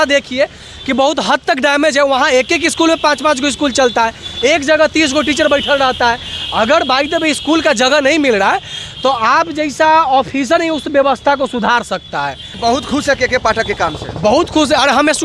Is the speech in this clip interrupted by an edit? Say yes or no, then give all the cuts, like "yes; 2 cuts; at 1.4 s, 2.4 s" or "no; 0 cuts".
yes; 1 cut; at 12.5 s